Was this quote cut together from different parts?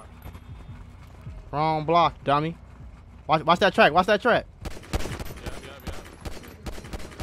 no; 0 cuts

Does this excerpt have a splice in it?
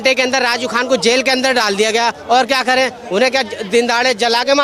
no; 0 cuts

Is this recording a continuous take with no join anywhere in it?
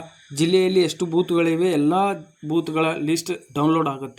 yes; 0 cuts

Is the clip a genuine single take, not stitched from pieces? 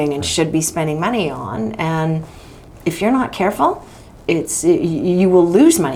yes; 0 cuts

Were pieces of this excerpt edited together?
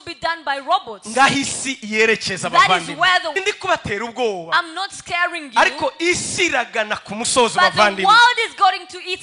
yes; 1 cut; at 3.4 s

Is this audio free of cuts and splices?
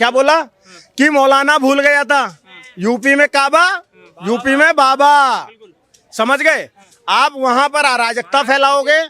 yes; 0 cuts

